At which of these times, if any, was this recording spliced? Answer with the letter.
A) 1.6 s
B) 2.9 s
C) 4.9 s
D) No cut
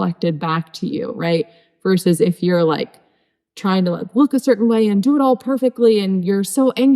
D